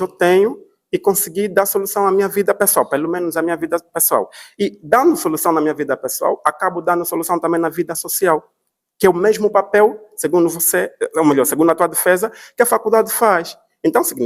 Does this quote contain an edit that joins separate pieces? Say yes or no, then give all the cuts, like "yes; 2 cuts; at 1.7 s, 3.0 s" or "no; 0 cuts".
no; 0 cuts